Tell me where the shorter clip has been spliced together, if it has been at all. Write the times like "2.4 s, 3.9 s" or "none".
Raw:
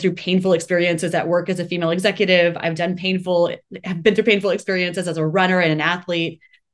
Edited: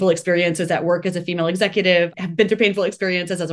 2.1 s